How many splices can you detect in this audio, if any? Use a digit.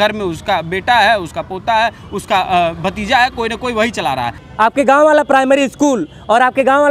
1